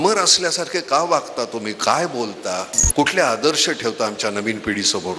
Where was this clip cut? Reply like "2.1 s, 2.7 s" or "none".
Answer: 2.8 s